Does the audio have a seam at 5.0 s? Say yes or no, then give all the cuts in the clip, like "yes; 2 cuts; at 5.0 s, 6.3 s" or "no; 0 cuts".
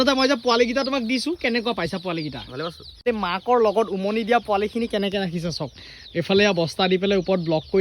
no; 1 cut; at 3.1 s